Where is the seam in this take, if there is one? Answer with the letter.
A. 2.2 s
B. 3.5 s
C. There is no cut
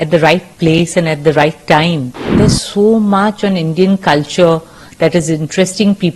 A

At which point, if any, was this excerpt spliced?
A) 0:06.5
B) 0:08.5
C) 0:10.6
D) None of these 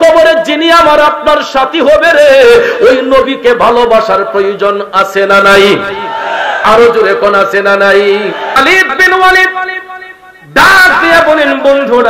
B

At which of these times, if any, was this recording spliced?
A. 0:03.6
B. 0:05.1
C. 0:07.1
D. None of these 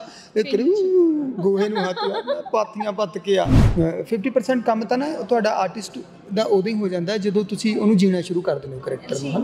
A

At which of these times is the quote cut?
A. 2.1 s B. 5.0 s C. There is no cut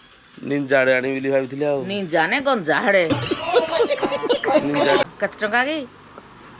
B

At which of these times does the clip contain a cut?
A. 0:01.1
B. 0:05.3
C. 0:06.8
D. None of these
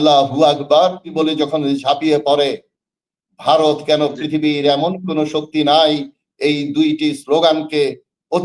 A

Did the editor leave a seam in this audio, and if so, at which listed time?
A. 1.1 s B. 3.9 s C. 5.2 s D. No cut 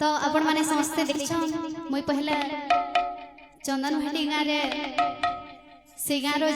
A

